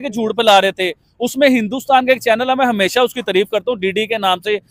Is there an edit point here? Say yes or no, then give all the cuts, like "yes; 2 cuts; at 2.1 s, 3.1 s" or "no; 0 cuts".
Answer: no; 0 cuts